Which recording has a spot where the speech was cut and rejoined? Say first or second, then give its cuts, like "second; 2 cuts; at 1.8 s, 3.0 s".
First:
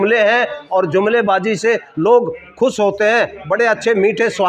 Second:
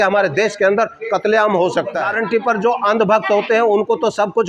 second; 1 cut; at 2.1 s